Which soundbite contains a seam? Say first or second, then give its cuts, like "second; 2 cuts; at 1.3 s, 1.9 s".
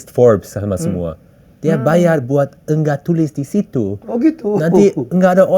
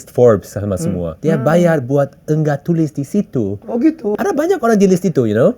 second; 2 cuts; at 1.1 s, 4.2 s